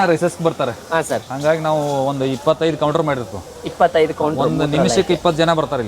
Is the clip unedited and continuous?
yes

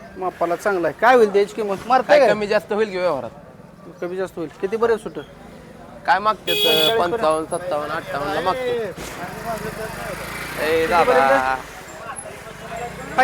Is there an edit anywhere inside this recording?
no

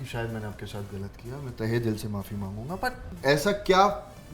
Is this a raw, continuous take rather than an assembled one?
no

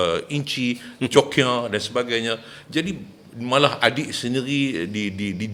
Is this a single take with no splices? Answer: yes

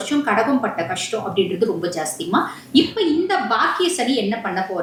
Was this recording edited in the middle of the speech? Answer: no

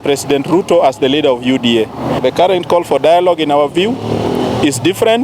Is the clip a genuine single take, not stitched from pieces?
no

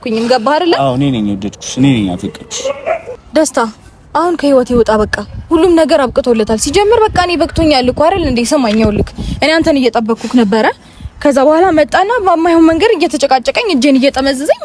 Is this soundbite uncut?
no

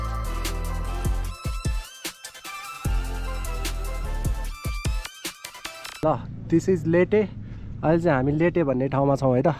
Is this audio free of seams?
no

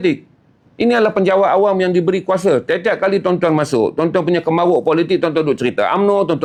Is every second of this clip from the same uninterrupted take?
yes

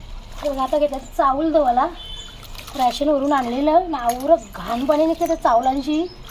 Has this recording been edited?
no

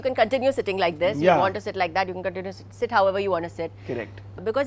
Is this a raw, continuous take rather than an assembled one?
yes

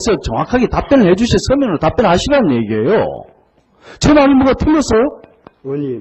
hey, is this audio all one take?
yes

